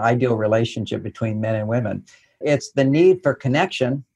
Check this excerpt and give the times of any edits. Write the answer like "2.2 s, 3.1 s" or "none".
2.4 s